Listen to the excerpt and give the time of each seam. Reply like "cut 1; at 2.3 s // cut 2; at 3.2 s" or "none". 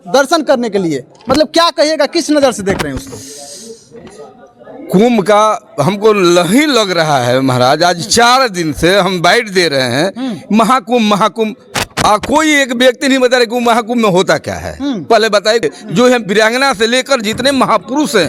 cut 1; at 15.6 s